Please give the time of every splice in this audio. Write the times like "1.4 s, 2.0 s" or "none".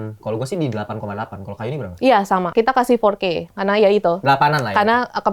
2.5 s